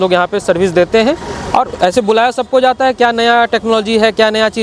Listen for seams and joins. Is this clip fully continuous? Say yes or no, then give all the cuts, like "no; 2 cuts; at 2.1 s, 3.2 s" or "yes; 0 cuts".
yes; 0 cuts